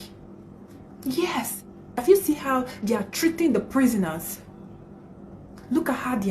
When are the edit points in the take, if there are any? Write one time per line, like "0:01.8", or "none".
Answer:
0:02.0